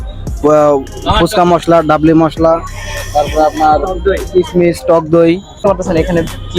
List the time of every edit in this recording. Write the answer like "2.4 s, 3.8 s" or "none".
5.6 s